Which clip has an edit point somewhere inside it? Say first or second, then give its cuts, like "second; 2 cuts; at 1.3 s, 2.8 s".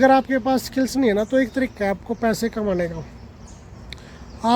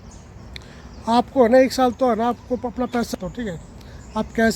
second; 1 cut; at 3.1 s